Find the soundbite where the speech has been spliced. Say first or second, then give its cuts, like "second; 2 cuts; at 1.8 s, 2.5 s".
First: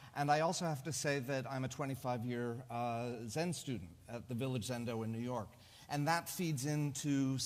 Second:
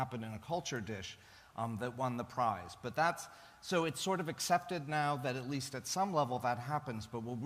second; 1 cut; at 4.7 s